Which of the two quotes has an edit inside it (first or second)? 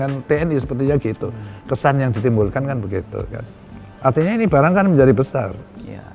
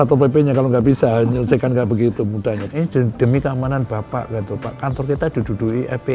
second